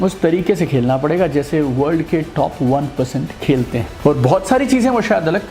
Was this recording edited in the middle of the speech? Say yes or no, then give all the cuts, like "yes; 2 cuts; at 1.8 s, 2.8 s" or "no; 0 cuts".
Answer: yes; 1 cut; at 3.9 s